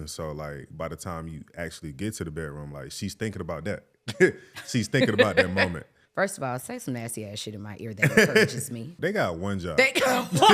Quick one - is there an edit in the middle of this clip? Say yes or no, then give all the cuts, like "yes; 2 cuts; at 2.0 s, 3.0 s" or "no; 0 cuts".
yes; 2 cuts; at 6.0 s, 8.9 s